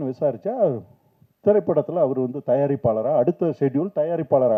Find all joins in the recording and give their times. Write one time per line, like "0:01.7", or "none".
none

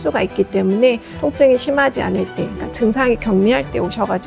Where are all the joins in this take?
0:01.1

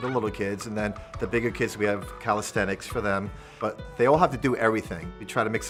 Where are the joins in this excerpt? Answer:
none

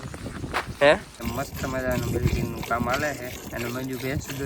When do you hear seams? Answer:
0:01.2

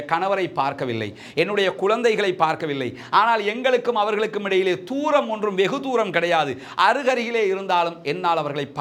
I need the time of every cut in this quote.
none

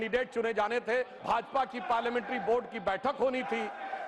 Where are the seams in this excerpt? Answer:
0:01.2

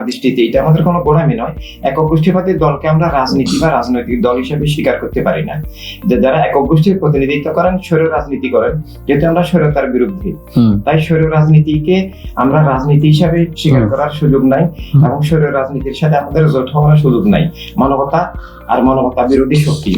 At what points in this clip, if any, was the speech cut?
none

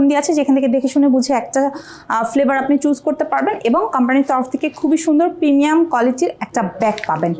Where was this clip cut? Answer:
none

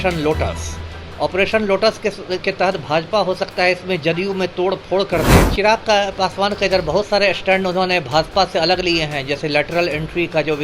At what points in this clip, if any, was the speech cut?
0:05.5

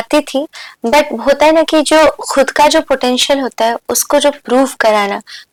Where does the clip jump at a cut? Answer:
none

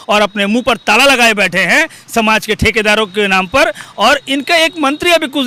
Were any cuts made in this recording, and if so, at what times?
none

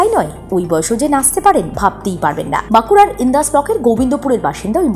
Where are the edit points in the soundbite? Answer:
none

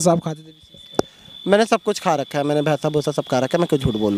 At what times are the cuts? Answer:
none

